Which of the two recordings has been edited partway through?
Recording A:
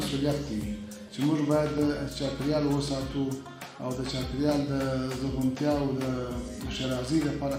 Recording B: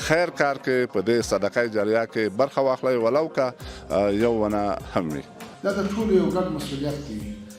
B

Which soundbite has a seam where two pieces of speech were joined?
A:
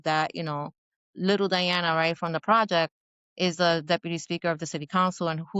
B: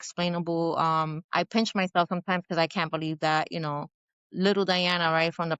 B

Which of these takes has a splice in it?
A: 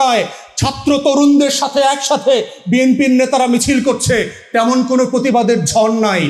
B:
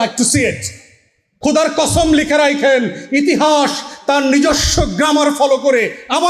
B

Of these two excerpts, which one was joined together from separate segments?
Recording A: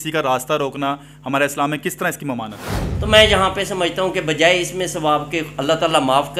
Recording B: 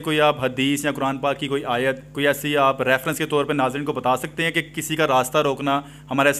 A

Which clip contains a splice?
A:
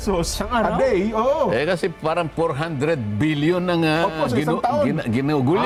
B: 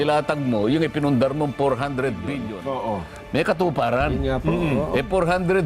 B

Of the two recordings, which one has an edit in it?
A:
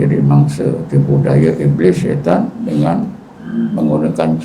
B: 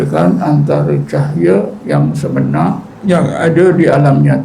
B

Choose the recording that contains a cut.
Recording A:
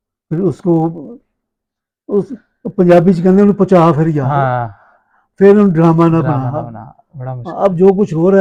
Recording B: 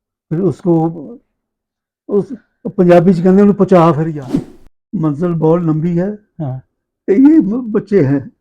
B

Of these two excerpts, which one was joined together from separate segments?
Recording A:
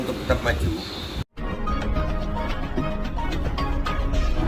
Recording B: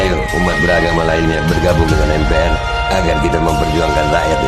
A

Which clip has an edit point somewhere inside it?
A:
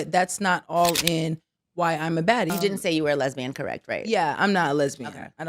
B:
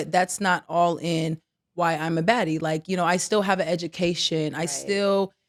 A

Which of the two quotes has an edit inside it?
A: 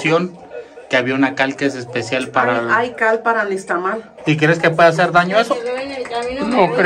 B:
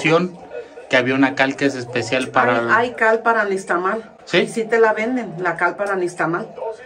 A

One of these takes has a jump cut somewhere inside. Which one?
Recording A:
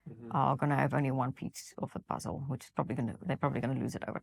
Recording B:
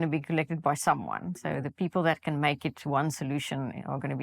B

